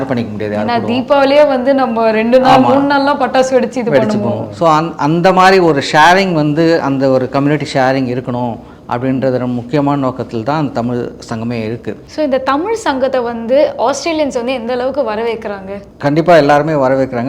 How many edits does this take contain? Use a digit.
0